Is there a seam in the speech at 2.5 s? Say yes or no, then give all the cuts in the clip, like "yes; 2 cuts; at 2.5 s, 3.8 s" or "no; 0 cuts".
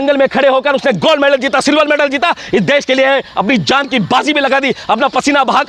no; 0 cuts